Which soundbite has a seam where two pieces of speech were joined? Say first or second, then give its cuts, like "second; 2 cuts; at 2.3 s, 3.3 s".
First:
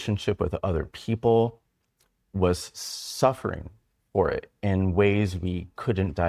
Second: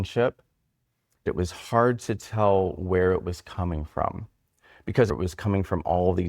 second; 2 cuts; at 1.3 s, 5.1 s